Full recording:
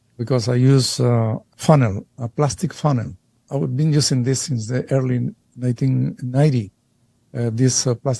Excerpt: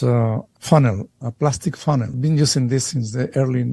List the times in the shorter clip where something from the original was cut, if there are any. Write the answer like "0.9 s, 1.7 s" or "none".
2.2 s